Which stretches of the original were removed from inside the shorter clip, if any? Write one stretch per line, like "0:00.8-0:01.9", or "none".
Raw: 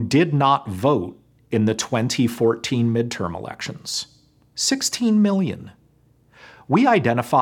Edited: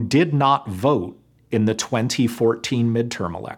none